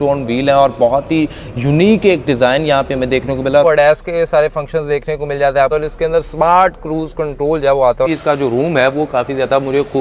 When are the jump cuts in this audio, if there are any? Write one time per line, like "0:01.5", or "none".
0:03.6
0:05.7
0:08.1